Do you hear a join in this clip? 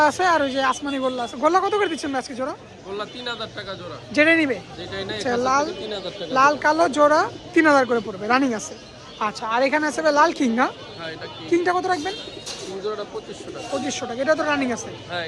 no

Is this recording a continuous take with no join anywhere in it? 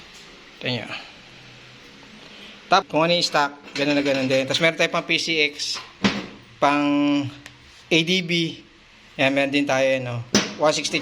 yes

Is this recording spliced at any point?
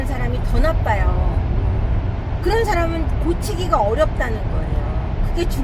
no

